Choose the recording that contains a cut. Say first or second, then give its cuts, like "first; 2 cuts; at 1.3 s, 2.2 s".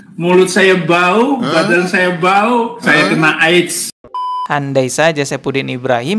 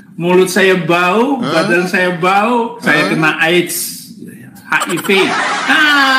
first; 1 cut; at 4.4 s